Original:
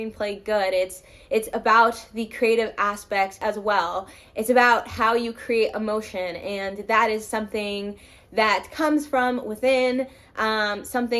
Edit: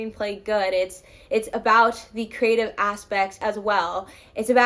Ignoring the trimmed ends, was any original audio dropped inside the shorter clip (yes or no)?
no